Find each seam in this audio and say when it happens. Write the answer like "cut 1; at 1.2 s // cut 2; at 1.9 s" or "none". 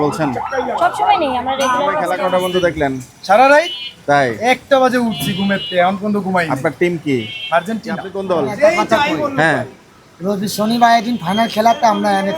cut 1; at 2.1 s // cut 2; at 8.1 s